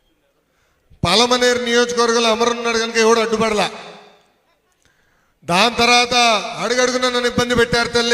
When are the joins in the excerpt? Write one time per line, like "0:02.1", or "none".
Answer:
none